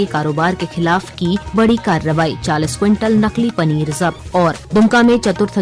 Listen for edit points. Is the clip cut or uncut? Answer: cut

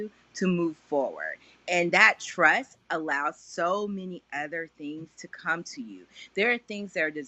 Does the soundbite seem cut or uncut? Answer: uncut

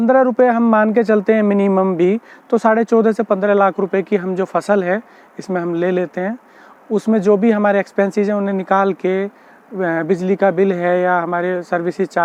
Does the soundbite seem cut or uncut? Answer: uncut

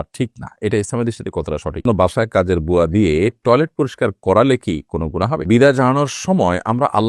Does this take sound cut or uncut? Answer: cut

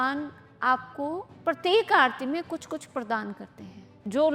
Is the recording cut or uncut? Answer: cut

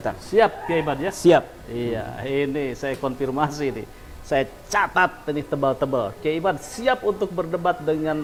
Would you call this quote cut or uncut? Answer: uncut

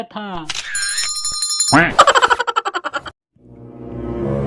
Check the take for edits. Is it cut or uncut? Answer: cut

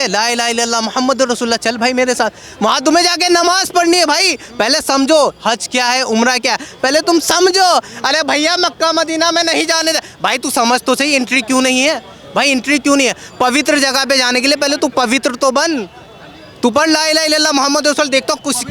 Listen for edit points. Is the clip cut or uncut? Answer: uncut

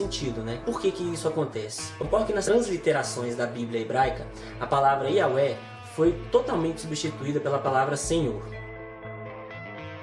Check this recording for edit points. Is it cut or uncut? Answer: uncut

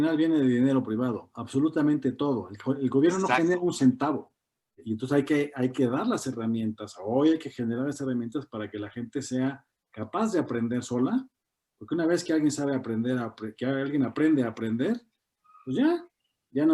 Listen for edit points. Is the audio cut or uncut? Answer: cut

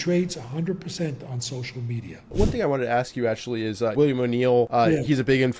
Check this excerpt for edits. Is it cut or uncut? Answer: cut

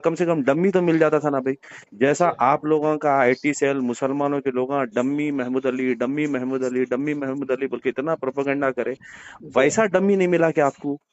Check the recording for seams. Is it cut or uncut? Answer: uncut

